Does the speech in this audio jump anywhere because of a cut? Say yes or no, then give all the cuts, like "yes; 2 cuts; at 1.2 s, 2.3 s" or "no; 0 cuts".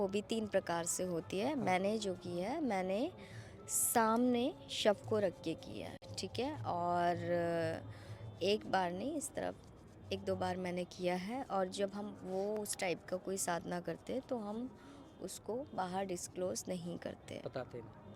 no; 0 cuts